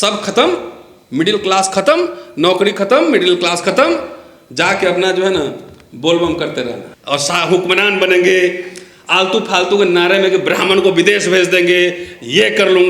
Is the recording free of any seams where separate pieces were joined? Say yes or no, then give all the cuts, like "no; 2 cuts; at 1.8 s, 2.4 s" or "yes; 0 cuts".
no; 1 cut; at 6.9 s